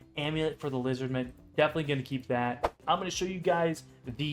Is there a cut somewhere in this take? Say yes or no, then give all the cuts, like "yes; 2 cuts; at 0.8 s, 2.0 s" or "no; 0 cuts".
yes; 1 cut; at 2.7 s